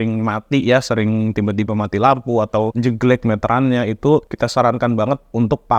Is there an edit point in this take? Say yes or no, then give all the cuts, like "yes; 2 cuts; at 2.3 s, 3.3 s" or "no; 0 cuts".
yes; 2 cuts; at 2.7 s, 4.3 s